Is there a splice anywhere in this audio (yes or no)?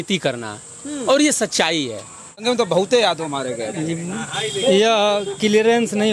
yes